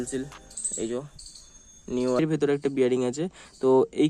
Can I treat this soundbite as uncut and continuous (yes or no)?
no